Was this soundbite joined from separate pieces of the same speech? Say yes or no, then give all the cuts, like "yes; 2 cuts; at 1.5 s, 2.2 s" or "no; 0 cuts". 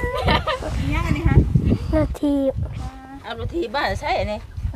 no; 0 cuts